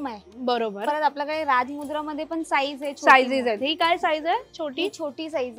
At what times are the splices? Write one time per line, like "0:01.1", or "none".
none